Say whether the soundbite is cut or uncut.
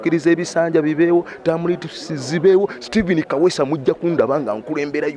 uncut